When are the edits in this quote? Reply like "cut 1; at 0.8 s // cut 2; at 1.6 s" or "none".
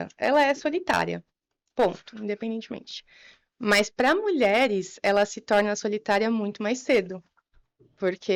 none